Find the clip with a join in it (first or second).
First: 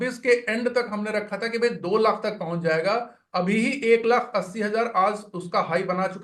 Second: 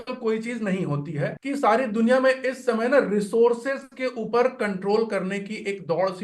second